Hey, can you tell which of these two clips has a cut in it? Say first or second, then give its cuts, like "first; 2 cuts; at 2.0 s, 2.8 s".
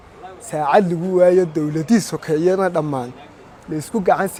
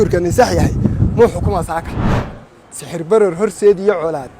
second; 1 cut; at 2.3 s